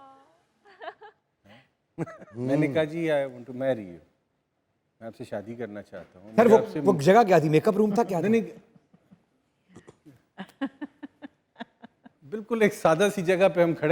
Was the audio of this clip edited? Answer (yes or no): no